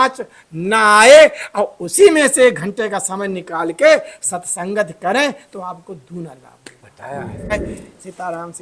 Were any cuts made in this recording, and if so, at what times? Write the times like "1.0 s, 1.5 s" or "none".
7.5 s